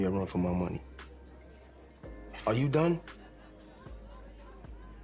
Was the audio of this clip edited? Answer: no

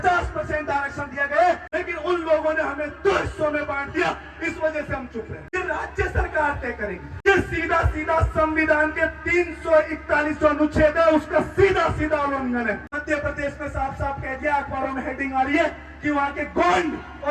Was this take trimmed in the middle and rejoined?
yes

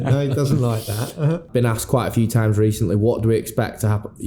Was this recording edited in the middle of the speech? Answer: yes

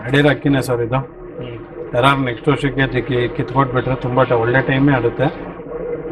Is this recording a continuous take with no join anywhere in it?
yes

